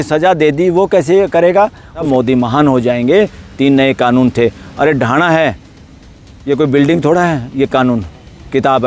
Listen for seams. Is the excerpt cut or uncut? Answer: cut